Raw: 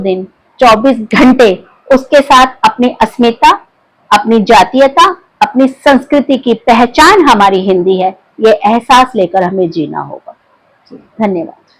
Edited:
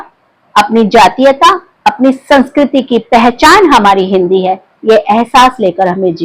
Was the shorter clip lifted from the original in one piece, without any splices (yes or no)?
yes